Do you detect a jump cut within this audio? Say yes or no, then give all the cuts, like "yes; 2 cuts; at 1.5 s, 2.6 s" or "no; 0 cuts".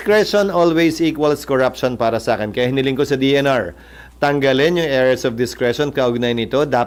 no; 0 cuts